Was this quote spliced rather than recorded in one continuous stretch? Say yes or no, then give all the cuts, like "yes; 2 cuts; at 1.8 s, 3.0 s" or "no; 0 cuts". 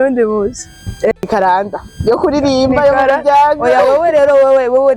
yes; 1 cut; at 1.3 s